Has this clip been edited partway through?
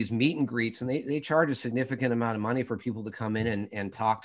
no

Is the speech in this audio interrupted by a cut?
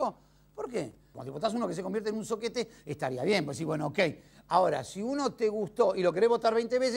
no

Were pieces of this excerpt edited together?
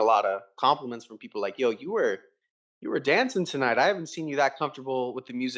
no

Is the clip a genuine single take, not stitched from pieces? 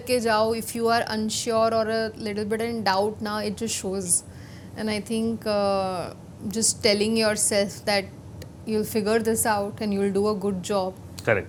yes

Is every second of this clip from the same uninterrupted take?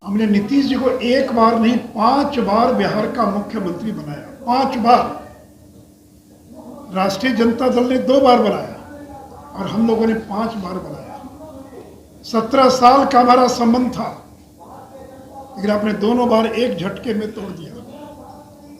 yes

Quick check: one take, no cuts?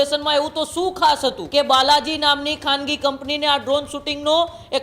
no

